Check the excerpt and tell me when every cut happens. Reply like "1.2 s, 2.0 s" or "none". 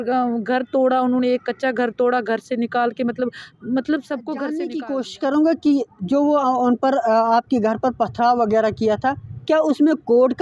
4.6 s